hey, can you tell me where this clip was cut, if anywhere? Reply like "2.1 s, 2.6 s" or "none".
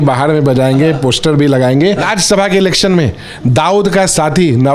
2.1 s